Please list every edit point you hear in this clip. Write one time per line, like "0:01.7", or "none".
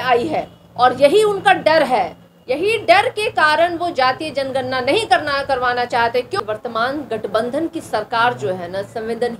0:06.4